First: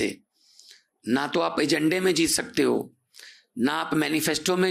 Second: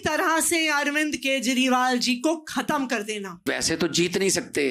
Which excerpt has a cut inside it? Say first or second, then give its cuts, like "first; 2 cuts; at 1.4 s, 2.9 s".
second; 1 cut; at 3.4 s